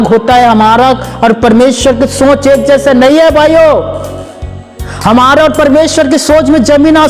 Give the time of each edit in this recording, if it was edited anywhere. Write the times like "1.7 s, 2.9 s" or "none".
none